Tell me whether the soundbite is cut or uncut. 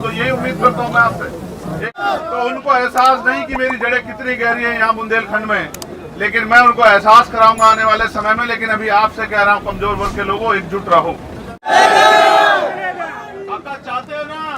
cut